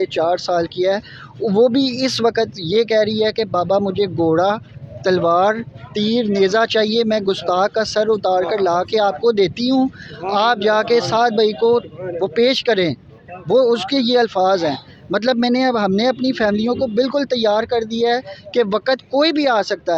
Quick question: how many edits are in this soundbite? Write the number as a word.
zero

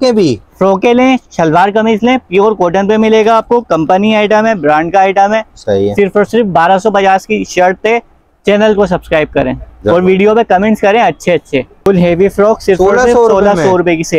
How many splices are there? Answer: one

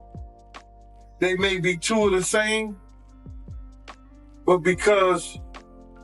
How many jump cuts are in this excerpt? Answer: two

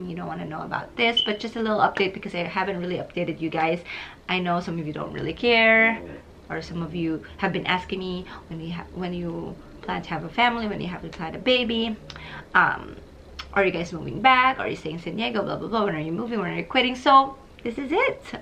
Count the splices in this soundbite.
zero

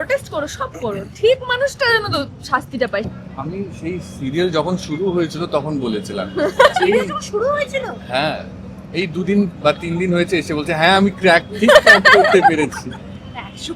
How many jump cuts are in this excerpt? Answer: one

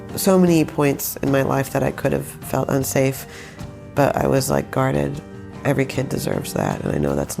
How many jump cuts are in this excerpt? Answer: one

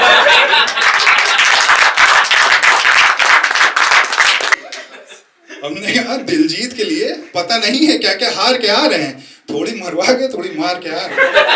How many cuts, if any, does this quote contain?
one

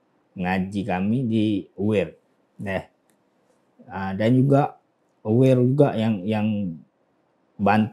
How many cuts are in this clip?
zero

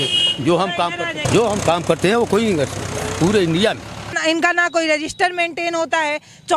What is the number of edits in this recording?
two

